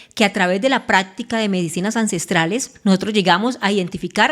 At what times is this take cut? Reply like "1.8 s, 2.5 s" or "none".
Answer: 2.7 s